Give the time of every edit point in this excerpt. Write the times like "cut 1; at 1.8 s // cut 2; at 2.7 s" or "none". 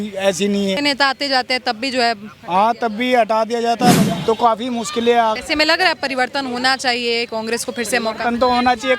cut 1; at 0.8 s // cut 2; at 4.0 s // cut 3; at 5.4 s

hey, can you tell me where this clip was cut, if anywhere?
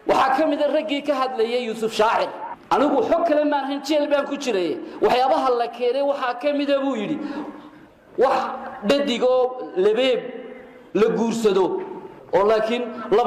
none

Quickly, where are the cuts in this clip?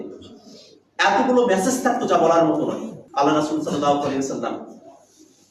cut 1; at 2.9 s

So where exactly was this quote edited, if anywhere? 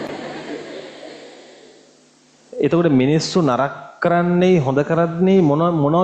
none

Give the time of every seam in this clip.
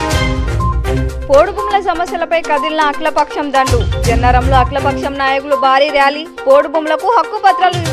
cut 1; at 1.1 s

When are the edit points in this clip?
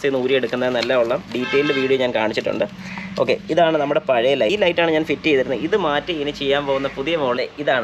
none

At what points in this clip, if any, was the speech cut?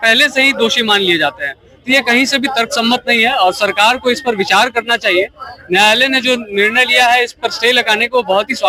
none

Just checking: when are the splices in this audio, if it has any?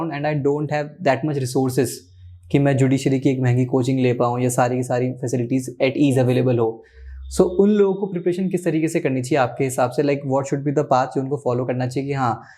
none

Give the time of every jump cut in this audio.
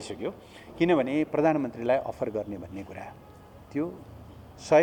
none

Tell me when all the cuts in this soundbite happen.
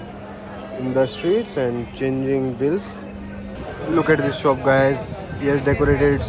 cut 1; at 3.5 s

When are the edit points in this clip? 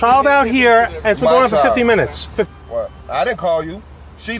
cut 1; at 2.5 s

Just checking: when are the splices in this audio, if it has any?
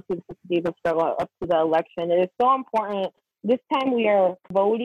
cut 1; at 3.2 s

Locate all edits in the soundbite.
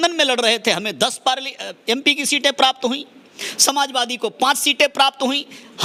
none

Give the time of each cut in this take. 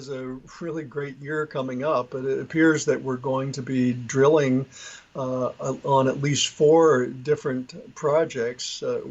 none

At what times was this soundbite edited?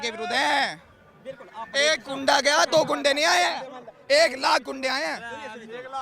none

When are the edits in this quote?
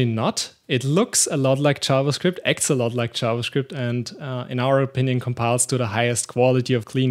none

